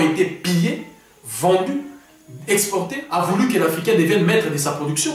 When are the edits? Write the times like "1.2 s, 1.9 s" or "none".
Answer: 3.0 s